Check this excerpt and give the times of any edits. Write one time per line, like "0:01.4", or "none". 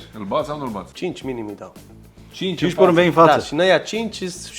0:00.9